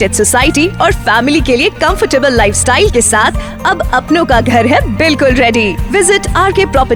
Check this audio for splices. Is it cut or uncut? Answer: uncut